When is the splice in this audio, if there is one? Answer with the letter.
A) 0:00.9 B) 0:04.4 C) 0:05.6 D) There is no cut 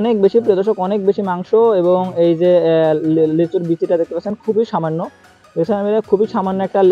D